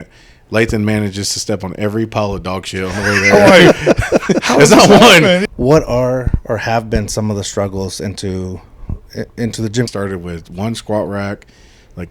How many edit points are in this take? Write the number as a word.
two